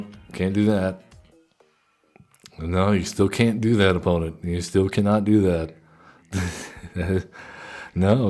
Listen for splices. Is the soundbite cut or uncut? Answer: cut